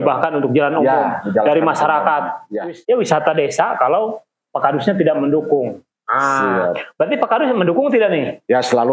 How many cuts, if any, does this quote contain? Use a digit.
1